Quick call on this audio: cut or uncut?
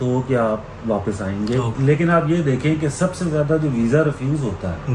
cut